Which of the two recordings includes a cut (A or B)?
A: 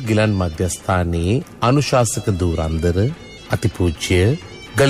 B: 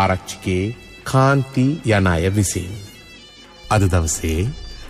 B